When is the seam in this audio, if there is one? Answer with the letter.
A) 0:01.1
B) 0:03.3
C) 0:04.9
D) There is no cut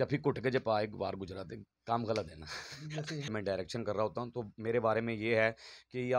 B